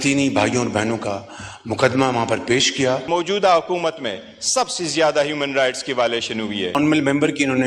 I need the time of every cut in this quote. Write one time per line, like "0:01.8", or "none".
0:03.1
0:06.8